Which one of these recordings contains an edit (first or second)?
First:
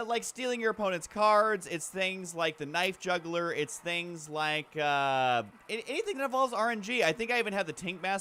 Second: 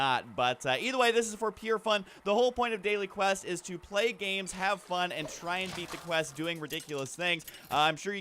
second